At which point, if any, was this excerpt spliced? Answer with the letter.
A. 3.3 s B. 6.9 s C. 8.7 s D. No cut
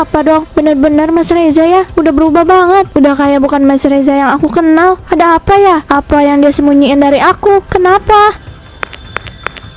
C